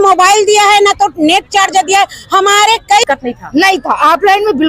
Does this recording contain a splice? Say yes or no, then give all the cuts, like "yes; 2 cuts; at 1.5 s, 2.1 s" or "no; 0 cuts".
yes; 1 cut; at 3.0 s